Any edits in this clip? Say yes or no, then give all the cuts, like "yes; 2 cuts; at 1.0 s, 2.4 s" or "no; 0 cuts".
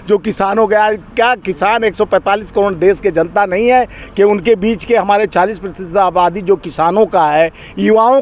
no; 0 cuts